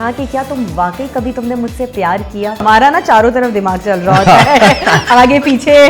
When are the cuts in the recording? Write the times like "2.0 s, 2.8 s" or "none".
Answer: 2.6 s